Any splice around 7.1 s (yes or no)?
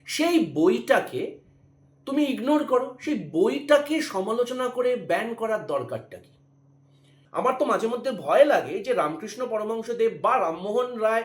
yes